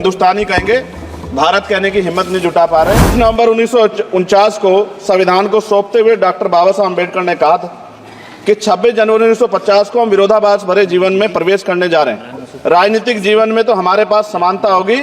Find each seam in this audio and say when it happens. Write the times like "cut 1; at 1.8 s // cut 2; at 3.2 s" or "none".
cut 1; at 3.1 s